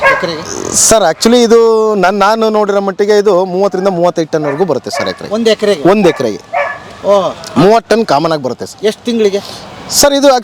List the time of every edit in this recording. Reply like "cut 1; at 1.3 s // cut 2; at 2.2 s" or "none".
none